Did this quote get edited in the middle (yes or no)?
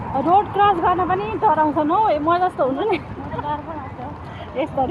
no